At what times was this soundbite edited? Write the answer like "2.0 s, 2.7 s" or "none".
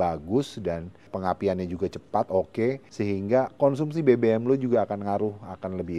1.1 s, 2.9 s